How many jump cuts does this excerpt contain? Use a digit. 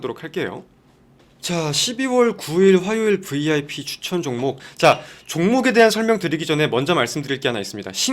1